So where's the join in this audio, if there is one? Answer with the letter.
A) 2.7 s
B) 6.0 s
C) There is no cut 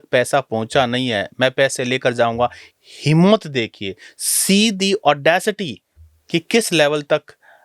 C